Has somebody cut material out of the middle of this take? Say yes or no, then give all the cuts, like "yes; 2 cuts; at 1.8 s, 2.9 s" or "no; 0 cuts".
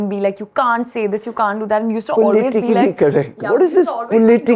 no; 0 cuts